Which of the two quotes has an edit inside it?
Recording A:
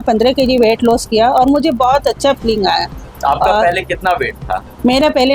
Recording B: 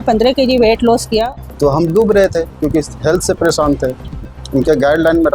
B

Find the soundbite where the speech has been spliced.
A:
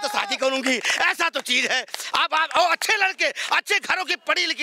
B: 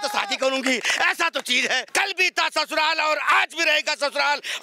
B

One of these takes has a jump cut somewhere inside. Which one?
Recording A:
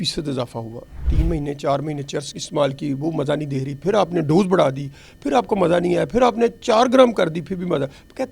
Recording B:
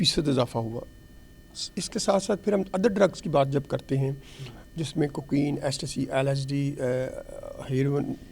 A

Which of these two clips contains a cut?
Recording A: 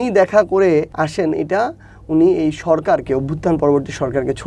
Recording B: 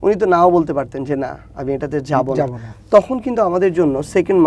A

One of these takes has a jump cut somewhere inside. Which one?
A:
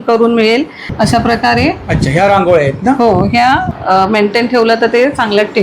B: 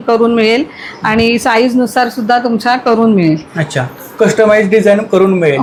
A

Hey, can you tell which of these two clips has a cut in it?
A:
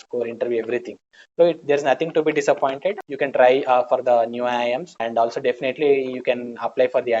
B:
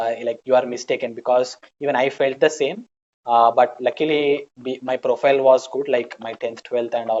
A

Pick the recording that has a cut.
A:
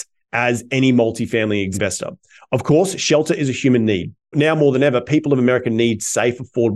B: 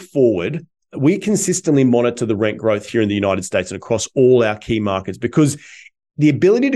A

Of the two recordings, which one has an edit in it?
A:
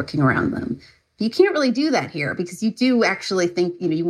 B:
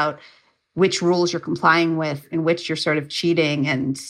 B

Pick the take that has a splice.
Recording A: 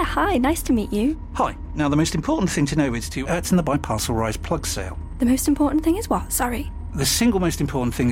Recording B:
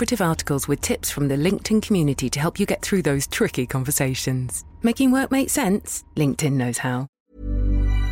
B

